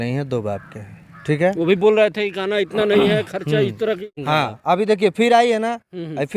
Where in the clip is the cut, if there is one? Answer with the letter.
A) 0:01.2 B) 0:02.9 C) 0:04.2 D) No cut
C